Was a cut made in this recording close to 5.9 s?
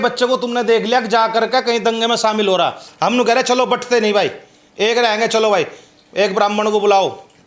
no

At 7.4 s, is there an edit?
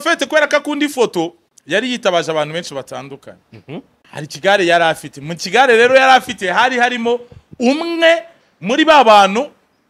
no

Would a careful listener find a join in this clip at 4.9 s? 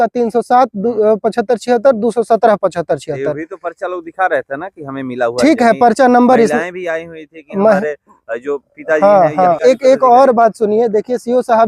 no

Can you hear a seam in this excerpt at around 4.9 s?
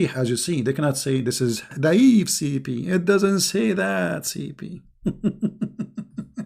no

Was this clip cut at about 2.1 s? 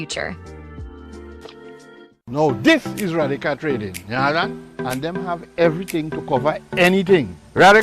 yes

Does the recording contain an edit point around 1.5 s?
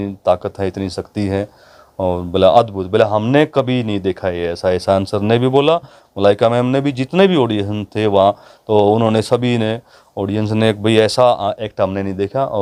no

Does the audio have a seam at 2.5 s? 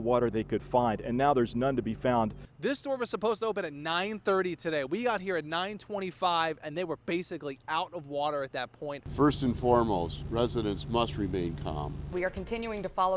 yes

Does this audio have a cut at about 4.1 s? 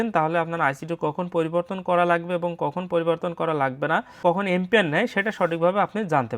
yes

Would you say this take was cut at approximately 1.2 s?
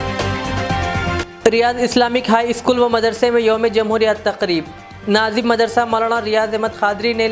yes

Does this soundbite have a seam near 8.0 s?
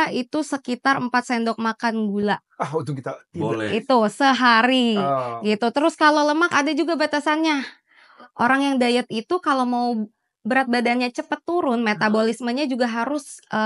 yes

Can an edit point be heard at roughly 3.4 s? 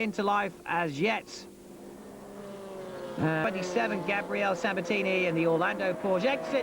yes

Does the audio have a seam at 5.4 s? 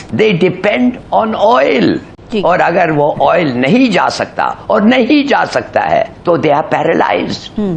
no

